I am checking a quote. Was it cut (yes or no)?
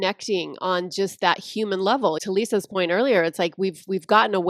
yes